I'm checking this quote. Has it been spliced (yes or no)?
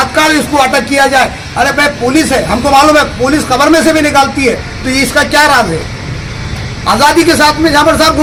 no